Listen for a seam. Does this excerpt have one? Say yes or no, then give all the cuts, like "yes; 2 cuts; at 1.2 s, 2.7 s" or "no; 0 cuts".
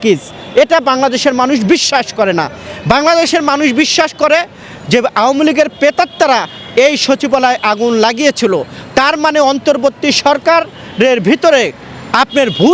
no; 0 cuts